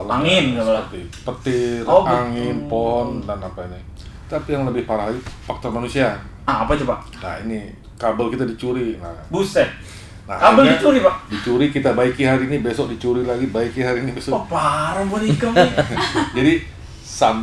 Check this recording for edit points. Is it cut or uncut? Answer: uncut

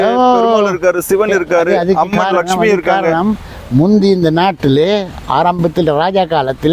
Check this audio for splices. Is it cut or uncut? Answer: uncut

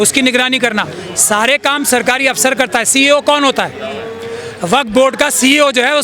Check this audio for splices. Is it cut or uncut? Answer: uncut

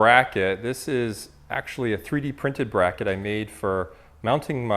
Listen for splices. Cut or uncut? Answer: uncut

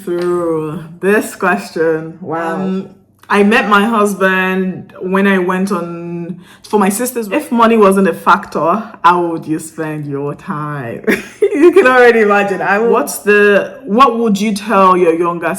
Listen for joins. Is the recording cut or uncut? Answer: cut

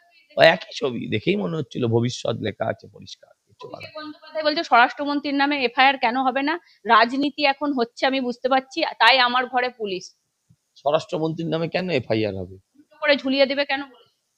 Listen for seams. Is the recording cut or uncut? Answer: uncut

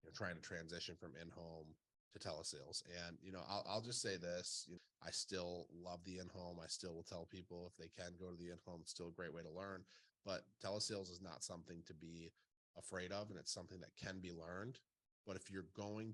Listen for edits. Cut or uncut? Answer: uncut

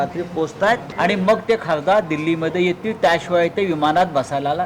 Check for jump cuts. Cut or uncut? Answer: uncut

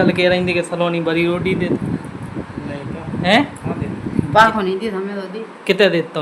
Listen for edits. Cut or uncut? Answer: uncut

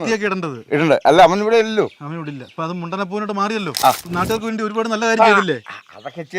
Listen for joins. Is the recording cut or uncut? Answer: cut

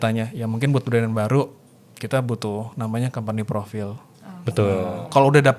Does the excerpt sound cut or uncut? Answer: uncut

